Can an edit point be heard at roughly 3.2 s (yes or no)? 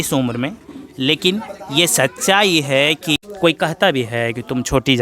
yes